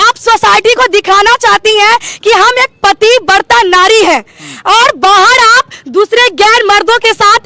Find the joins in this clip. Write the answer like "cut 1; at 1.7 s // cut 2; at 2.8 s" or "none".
none